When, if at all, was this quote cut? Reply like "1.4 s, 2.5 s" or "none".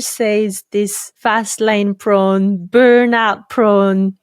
1.1 s

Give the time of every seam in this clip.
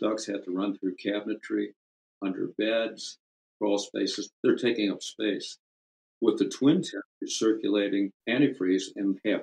8.2 s

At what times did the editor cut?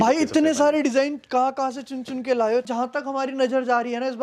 2.7 s

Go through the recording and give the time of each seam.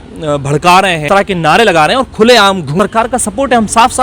1.0 s, 2.7 s

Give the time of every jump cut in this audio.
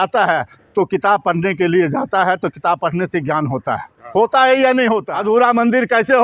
5.1 s

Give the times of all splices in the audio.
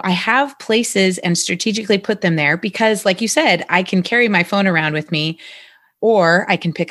5.9 s

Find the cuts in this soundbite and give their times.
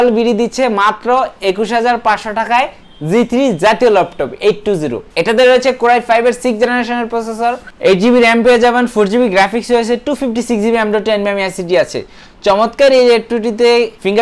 none

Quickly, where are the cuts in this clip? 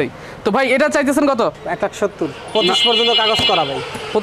1.6 s

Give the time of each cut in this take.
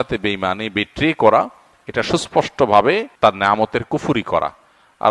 3.1 s

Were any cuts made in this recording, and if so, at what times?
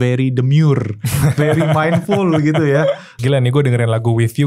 3.1 s

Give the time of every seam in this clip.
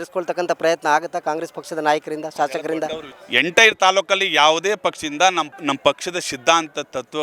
3.1 s, 5.5 s

